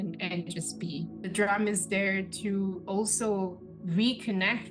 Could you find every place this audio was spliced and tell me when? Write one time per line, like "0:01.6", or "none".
0:01.3
0:03.7